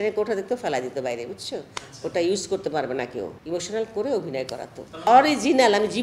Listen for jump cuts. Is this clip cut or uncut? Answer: cut